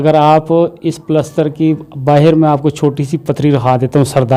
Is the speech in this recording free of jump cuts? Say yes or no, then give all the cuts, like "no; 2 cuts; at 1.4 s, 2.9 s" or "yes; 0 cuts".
yes; 0 cuts